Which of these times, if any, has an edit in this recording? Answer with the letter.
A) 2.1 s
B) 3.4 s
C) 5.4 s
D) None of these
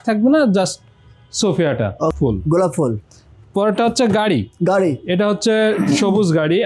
A